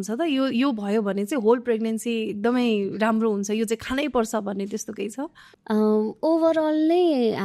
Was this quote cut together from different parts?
no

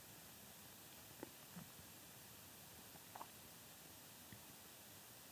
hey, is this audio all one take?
yes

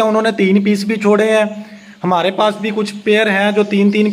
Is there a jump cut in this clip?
no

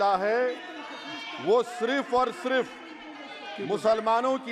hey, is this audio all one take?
yes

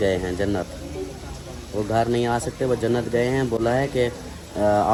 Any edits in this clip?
no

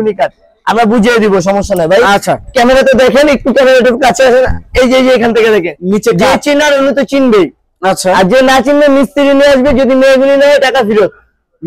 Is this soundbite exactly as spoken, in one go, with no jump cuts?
yes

